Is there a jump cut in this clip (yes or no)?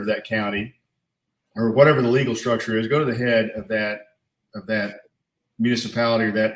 no